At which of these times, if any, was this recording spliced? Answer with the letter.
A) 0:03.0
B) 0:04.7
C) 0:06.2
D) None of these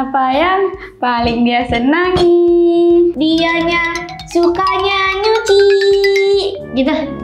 D